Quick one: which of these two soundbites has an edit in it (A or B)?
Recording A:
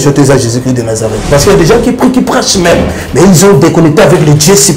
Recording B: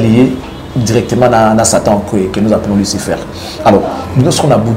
A